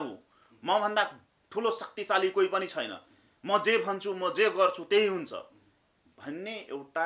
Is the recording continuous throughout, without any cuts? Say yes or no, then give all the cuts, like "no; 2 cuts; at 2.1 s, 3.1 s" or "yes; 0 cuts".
yes; 0 cuts